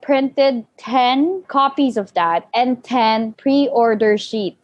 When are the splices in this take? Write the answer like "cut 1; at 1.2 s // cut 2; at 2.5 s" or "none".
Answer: cut 1; at 1.5 s // cut 2; at 2.5 s // cut 3; at 3.3 s